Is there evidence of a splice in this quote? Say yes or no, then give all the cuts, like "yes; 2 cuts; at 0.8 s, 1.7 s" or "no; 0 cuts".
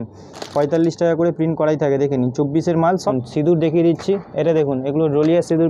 yes; 1 cut; at 3.1 s